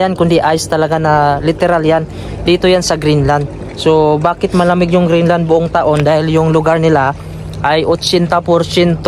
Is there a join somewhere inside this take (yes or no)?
no